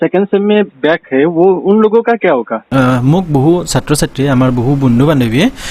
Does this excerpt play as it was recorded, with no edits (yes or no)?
no